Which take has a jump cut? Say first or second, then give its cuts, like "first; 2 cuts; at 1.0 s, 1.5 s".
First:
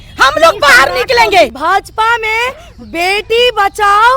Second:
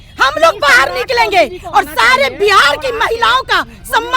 first; 1 cut; at 1.6 s